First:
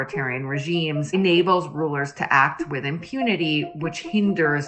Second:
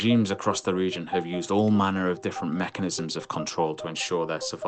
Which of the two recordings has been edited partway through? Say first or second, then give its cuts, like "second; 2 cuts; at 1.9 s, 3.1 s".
first; 1 cut; at 1.1 s